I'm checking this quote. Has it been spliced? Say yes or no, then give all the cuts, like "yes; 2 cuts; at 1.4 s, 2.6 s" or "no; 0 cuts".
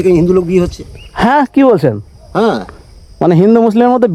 no; 0 cuts